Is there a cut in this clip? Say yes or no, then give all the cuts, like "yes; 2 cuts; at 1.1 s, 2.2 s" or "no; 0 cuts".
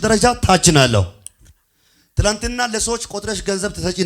no; 0 cuts